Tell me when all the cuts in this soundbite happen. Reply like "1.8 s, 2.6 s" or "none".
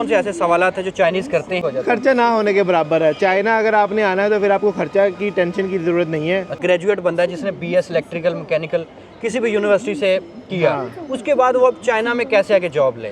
1.6 s, 6.6 s